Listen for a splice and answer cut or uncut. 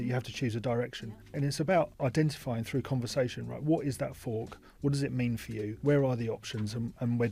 uncut